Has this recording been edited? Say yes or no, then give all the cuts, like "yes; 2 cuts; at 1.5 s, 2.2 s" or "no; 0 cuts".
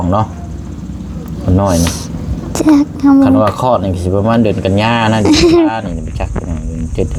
no; 0 cuts